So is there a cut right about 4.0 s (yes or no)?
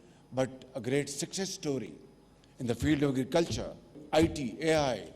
yes